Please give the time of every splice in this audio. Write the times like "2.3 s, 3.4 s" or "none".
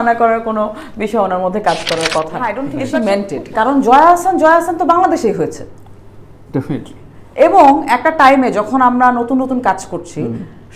2.7 s

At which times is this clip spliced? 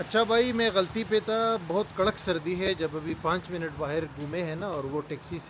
none

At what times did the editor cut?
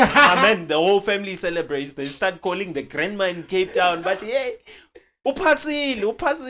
none

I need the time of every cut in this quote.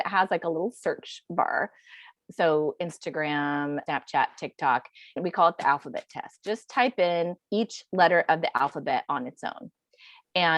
2.1 s, 3.8 s, 5.2 s, 7.4 s

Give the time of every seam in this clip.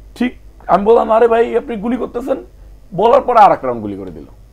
none

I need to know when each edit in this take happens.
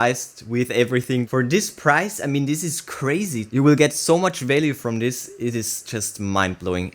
3.4 s

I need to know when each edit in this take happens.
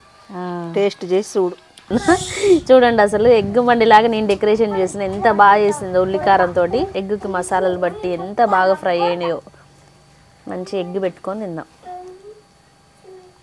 1.9 s, 7.0 s

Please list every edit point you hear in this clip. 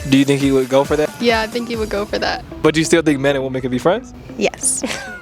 1.1 s, 2.6 s, 4.2 s

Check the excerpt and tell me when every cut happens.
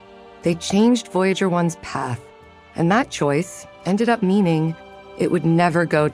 none

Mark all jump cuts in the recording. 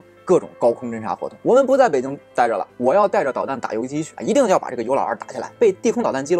1.3 s, 4.1 s, 5.5 s

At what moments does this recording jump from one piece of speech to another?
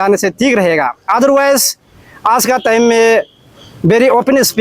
none

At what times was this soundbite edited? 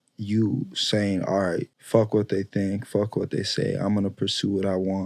1.8 s

